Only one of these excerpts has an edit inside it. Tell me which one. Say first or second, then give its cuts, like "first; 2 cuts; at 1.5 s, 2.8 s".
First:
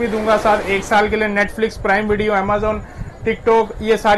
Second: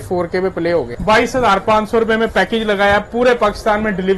second; 1 cut; at 0.9 s